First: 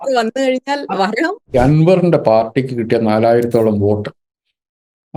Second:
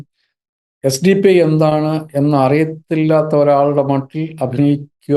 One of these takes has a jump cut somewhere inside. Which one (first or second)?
first